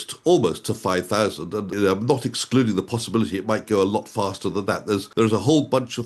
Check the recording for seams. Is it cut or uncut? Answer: cut